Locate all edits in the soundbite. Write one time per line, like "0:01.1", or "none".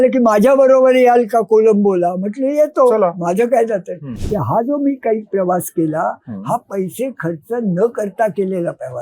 0:04.1